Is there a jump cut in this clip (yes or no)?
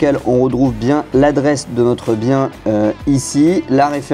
no